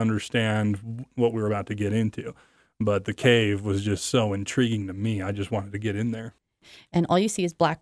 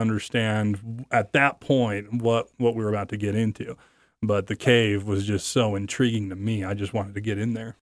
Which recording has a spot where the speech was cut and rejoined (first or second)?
first